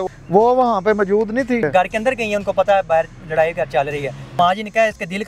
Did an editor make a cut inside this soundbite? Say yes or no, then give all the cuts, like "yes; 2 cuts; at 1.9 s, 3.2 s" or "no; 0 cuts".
yes; 2 cuts; at 1.7 s, 4.4 s